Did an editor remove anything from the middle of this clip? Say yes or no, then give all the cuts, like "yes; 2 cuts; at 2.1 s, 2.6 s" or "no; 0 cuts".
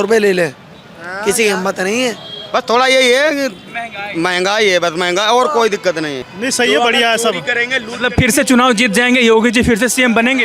yes; 1 cut; at 6.2 s